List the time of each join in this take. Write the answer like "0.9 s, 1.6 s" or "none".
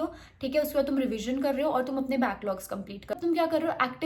3.1 s